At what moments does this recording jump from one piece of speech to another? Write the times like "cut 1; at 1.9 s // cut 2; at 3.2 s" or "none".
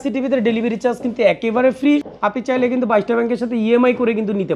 cut 1; at 2.0 s